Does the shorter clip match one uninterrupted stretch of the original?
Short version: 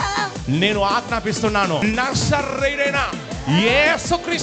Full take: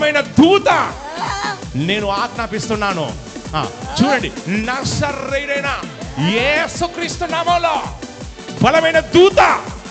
no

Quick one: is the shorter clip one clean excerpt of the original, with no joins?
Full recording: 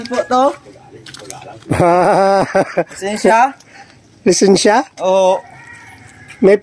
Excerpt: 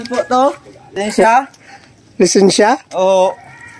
no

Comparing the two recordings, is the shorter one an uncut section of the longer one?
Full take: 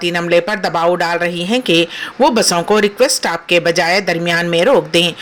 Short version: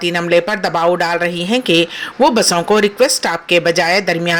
yes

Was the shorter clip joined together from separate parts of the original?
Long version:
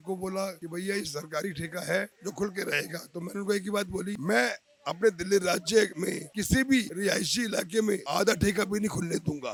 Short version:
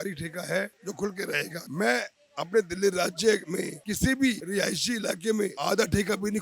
yes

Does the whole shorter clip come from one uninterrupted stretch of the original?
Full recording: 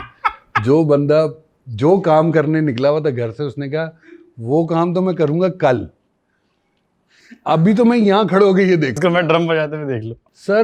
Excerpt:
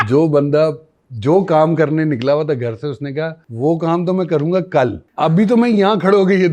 no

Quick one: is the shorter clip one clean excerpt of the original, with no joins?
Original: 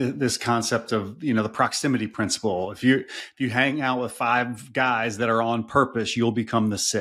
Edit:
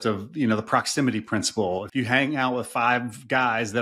no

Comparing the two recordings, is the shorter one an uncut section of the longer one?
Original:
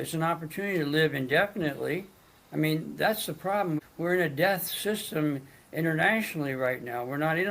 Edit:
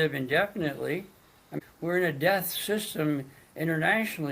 no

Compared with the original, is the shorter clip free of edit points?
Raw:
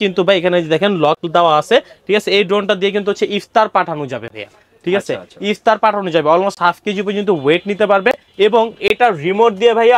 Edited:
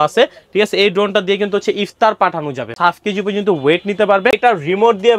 no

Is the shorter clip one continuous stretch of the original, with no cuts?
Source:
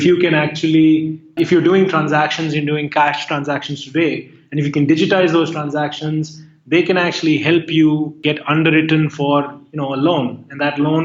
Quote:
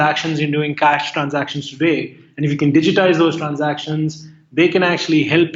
yes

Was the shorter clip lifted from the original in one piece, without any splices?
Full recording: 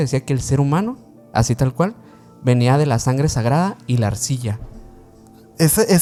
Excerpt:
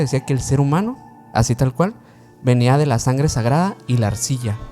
yes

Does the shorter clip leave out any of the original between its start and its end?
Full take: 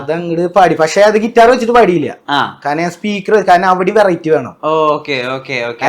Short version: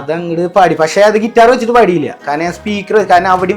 yes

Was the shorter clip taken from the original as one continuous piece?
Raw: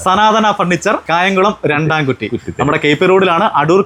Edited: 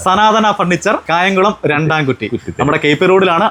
yes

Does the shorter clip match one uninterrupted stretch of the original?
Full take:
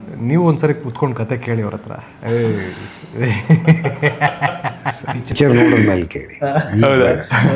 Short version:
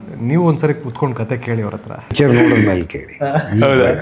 no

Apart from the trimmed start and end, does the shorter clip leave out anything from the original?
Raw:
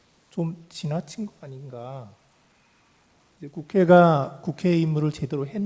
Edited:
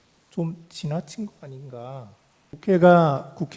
yes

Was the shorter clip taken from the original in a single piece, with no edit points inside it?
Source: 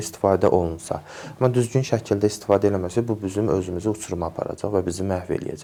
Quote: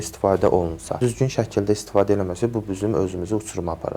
no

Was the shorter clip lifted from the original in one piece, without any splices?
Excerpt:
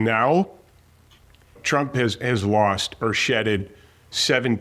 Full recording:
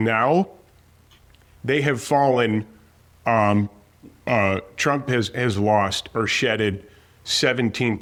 no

